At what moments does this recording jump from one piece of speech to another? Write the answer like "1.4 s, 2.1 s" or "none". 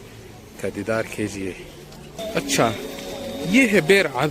2.2 s